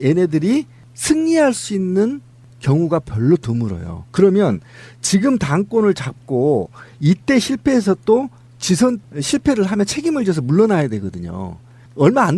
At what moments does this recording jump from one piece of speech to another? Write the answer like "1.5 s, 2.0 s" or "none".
2.4 s

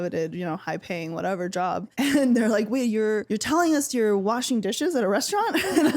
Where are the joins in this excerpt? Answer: 1.9 s, 3.3 s

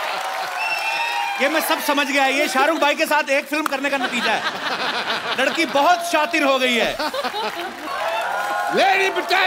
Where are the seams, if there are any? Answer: 7.8 s

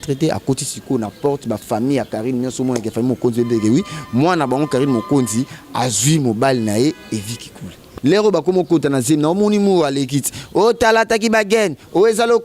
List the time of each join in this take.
7.9 s

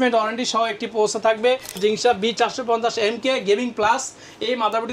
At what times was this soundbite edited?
1.8 s

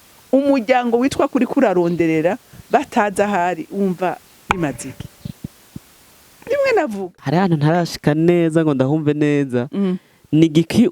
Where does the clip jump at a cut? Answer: 7.1 s

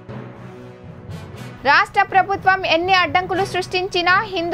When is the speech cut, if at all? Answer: 1.5 s

